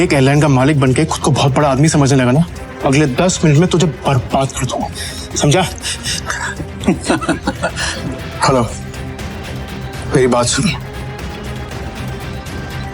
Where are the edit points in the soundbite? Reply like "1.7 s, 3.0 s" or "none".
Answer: 2.6 s, 7.9 s, 11.7 s